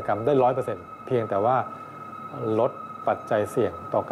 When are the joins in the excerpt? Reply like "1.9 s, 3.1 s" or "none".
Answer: 1.0 s